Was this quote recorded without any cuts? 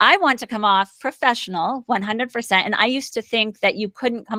yes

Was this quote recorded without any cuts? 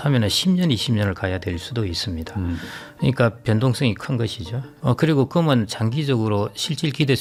yes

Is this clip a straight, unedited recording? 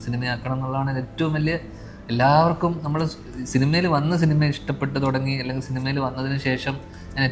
yes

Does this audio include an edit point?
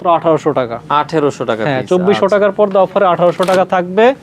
no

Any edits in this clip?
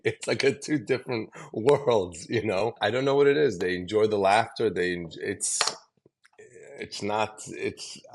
yes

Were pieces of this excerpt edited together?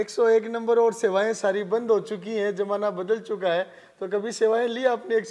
no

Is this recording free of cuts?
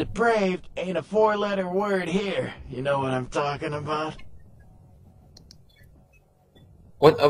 yes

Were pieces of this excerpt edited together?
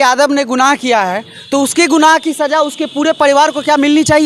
no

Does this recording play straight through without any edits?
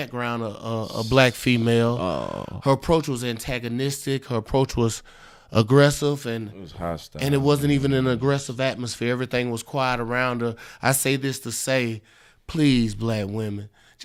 yes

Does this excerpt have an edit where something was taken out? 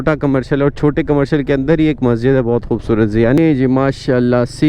yes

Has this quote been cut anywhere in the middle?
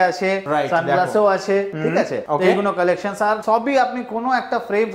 no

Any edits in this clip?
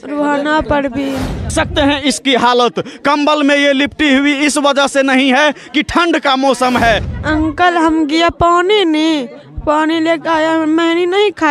yes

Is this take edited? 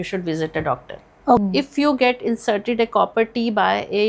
yes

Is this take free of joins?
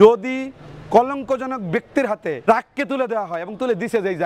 no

